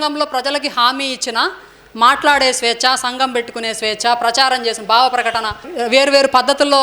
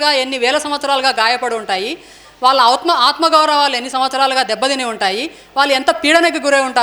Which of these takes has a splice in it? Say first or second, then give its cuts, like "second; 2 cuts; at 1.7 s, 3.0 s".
first; 1 cut; at 5.7 s